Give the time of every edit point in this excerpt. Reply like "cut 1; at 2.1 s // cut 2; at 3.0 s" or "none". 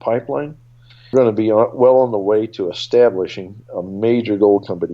cut 1; at 1.1 s